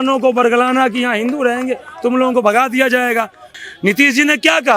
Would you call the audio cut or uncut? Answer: cut